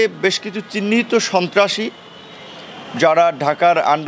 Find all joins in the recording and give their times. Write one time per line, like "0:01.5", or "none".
none

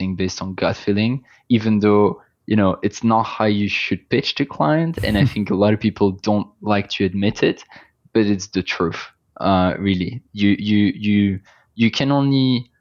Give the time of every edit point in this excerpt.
none

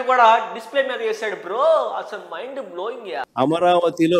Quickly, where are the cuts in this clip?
0:03.2

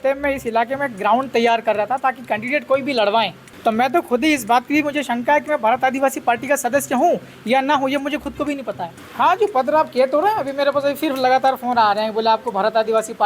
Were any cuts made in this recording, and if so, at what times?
0:03.4
0:09.0

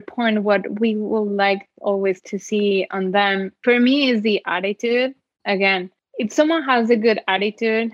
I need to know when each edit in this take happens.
0:03.5
0:06.0

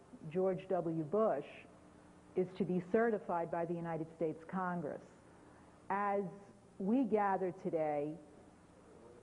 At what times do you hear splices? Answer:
0:02.6

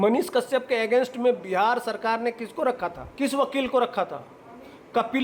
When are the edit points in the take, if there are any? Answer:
0:03.0

